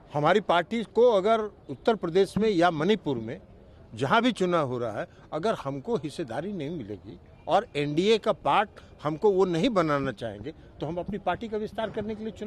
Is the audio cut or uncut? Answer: uncut